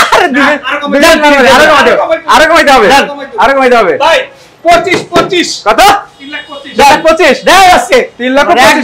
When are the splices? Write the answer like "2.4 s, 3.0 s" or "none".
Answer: none